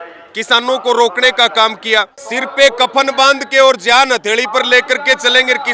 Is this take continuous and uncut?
no; 1 cut; at 2.2 s

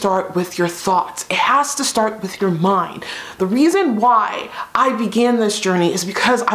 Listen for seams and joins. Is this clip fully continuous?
yes; 0 cuts

